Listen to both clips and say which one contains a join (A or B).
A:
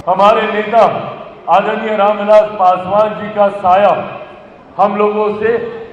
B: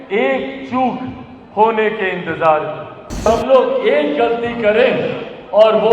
B